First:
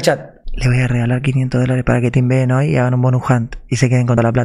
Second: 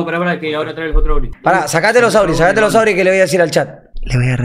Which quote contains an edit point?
second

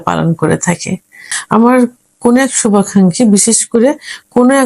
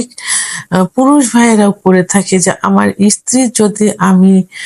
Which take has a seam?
first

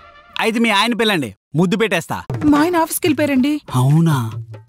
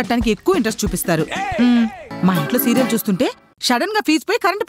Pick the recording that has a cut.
second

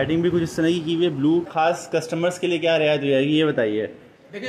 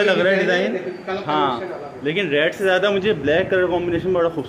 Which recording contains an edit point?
first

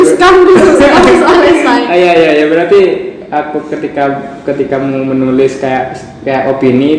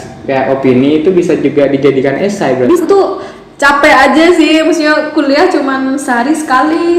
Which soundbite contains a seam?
second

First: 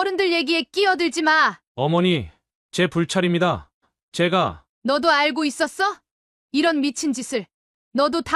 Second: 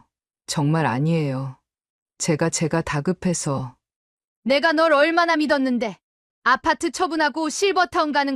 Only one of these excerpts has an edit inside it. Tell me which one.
first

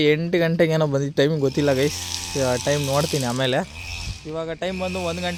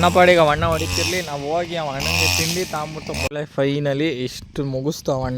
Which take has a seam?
second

